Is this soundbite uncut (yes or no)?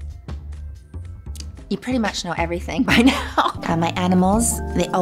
no